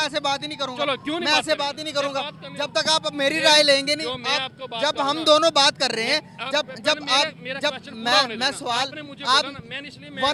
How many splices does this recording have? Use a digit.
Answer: 0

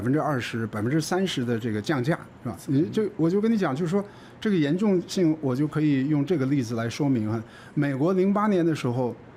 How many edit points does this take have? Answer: 0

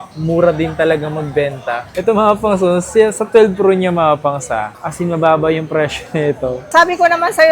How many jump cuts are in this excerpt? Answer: 3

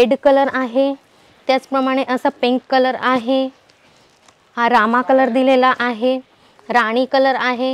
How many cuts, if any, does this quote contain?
0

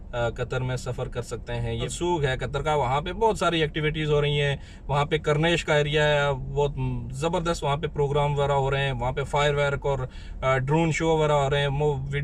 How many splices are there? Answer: 1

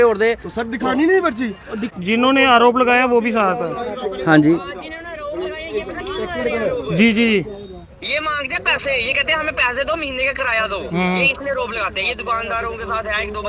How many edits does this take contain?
1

